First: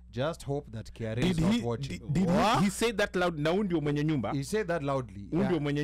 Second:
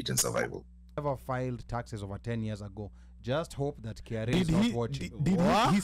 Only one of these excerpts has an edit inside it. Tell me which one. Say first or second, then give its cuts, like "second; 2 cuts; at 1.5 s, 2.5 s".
second; 1 cut; at 1.0 s